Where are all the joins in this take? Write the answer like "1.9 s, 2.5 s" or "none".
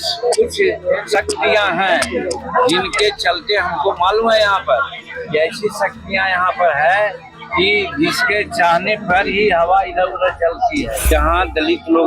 11.0 s